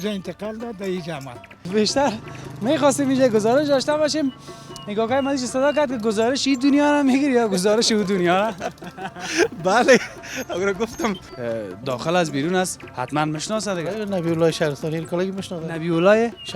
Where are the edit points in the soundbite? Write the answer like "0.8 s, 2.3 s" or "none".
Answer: 1.7 s, 11.3 s